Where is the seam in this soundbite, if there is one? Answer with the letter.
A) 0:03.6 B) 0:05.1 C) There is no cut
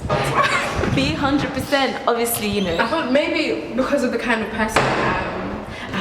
A